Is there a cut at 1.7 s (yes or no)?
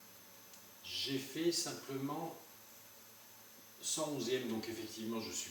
no